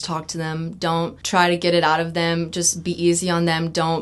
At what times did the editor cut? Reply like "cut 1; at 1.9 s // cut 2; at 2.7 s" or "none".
cut 1; at 1.2 s